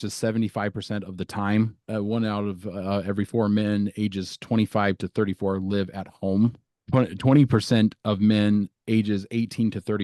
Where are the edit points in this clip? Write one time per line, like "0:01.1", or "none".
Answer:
0:01.9
0:06.7